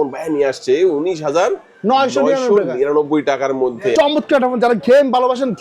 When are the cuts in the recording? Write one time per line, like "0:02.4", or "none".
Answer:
0:03.9